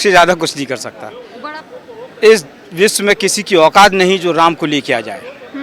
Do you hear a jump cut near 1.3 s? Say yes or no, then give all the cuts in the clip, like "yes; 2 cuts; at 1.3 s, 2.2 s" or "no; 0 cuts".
yes; 1 cut; at 1.3 s